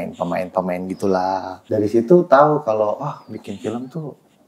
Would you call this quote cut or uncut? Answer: cut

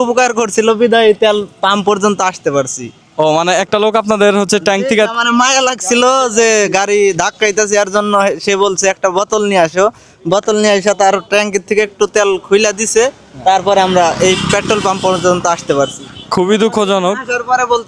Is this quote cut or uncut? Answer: uncut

